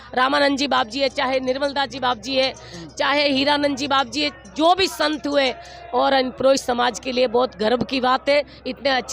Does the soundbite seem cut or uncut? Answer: uncut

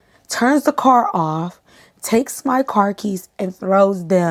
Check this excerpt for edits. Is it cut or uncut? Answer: uncut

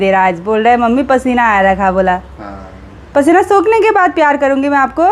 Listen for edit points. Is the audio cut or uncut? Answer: uncut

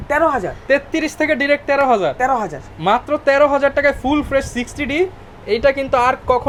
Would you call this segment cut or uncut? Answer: uncut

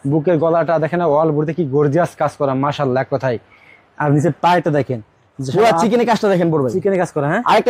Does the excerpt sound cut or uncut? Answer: uncut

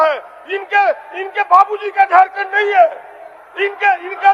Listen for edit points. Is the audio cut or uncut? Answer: uncut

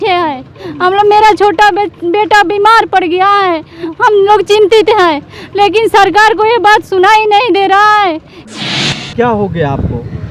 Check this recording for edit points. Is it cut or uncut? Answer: cut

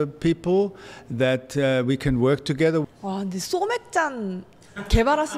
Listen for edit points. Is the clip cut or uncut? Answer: cut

